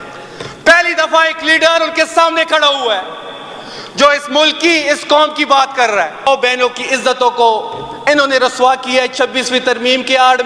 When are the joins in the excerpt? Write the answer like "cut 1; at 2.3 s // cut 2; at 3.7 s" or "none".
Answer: cut 1; at 6.3 s

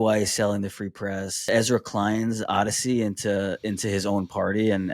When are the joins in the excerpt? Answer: cut 1; at 1.5 s

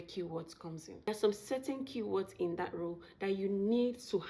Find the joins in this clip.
cut 1; at 1.1 s

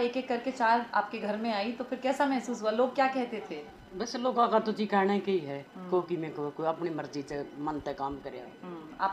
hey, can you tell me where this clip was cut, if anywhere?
none

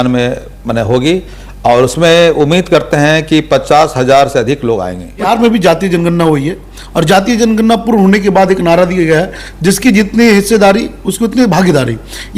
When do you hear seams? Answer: cut 1; at 5.3 s // cut 2; at 11.0 s

